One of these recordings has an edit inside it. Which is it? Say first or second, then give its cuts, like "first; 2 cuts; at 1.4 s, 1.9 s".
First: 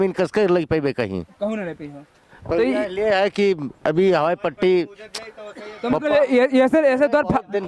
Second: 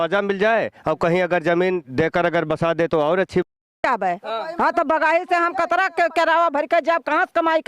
second; 1 cut; at 3.7 s